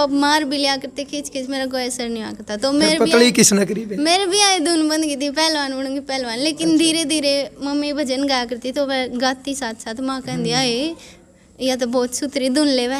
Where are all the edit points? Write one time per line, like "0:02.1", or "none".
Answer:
none